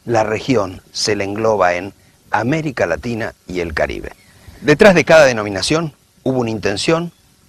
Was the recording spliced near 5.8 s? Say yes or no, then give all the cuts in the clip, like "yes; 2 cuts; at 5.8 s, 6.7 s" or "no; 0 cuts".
no; 0 cuts